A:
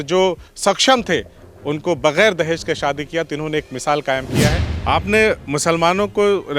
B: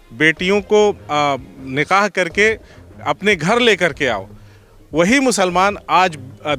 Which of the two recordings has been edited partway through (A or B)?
A